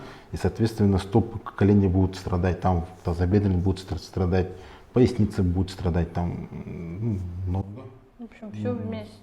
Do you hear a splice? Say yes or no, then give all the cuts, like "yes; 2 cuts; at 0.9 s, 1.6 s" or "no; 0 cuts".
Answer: no; 0 cuts